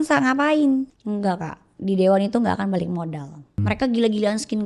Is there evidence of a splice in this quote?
yes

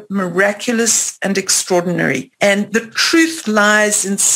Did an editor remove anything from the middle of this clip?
yes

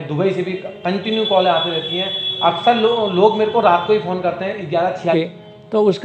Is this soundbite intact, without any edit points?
no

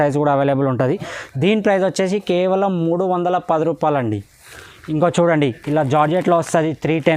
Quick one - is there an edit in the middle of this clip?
no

